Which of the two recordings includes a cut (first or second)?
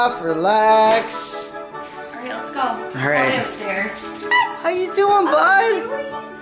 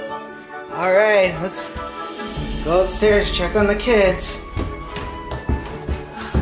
first